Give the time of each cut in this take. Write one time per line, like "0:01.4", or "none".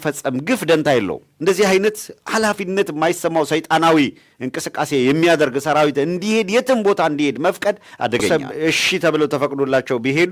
0:01.2
0:08.3